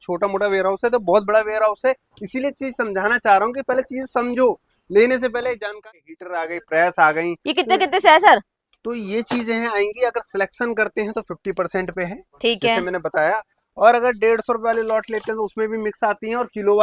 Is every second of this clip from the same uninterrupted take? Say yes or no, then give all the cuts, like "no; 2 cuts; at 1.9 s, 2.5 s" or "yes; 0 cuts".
no; 1 cut; at 5.8 s